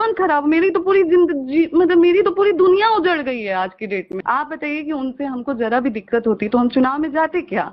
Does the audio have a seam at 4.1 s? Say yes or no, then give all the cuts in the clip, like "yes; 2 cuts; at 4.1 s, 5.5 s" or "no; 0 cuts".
yes; 1 cut; at 4.1 s